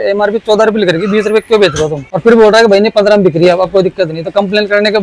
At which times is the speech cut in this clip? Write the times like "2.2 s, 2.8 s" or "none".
2.0 s